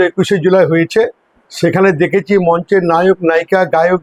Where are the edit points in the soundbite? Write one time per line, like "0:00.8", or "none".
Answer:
none